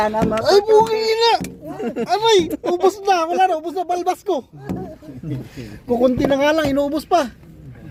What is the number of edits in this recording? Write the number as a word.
zero